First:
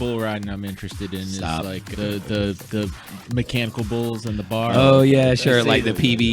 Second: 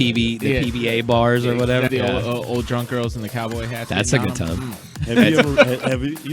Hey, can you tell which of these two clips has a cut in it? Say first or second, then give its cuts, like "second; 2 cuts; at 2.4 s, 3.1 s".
second; 2 cuts; at 1.9 s, 4.9 s